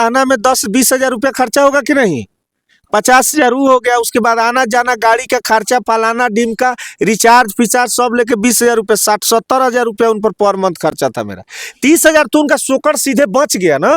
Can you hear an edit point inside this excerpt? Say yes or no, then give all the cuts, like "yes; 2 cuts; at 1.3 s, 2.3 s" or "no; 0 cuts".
no; 0 cuts